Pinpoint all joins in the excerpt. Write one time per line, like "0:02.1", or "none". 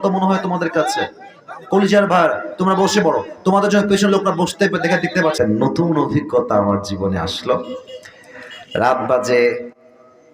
0:05.3